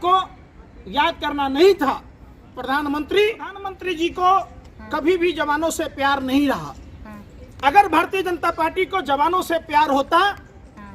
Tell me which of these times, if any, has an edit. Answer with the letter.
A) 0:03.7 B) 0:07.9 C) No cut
A